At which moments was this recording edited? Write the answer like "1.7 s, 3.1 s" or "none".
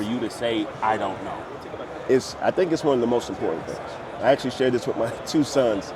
none